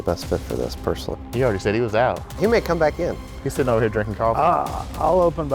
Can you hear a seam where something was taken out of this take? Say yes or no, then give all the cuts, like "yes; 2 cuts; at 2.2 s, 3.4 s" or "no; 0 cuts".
yes; 1 cut; at 2.4 s